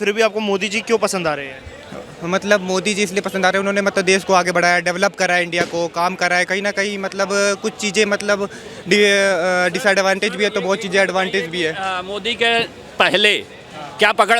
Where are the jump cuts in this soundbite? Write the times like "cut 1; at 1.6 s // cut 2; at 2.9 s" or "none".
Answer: none